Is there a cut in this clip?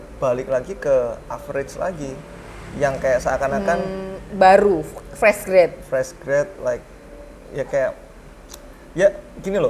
no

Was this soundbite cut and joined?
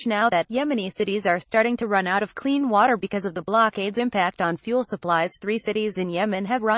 yes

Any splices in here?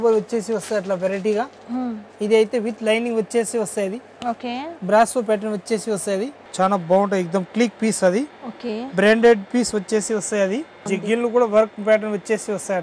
yes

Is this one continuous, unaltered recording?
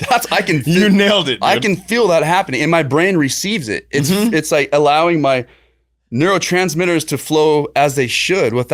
yes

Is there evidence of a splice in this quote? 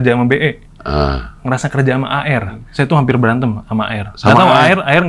yes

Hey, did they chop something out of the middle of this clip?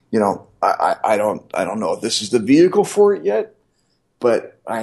no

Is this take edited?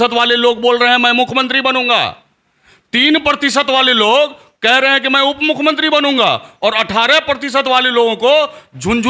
no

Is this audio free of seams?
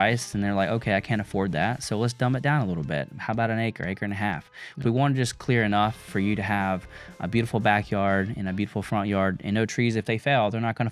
yes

